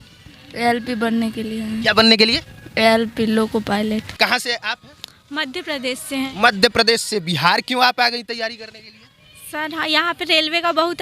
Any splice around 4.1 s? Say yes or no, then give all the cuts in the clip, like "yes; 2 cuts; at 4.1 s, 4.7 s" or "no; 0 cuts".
yes; 1 cut; at 4.1 s